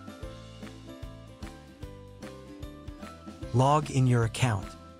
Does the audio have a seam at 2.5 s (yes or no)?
no